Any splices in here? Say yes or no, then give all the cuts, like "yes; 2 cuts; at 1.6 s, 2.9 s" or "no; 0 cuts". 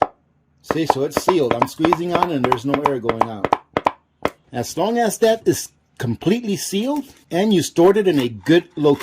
yes; 2 cuts; at 4.4 s, 7.2 s